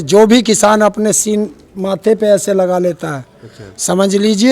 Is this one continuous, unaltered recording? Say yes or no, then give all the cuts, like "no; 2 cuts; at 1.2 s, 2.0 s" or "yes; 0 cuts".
yes; 0 cuts